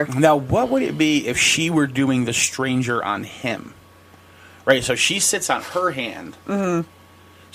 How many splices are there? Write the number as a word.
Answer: zero